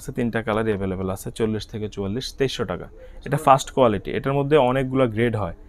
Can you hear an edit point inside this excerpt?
no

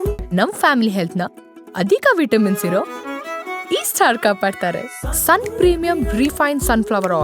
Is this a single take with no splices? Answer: yes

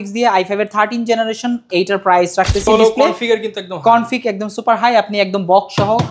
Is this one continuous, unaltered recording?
no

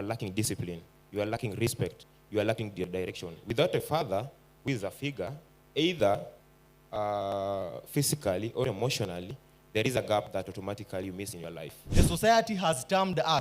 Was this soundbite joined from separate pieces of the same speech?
yes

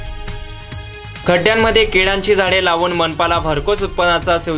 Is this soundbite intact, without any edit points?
no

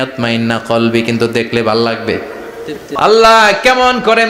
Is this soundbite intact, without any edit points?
no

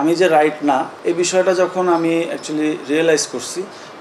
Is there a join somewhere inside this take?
yes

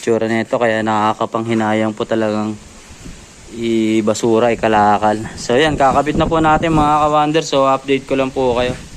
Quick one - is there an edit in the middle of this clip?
yes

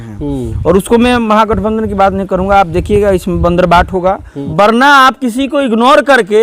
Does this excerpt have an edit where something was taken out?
yes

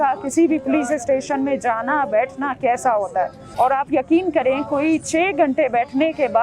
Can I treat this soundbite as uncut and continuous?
no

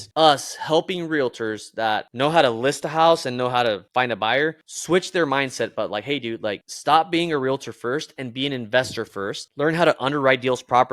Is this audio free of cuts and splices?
yes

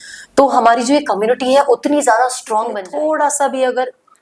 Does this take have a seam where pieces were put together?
yes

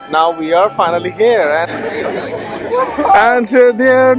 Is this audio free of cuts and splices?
no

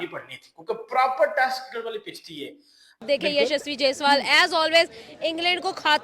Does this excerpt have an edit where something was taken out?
yes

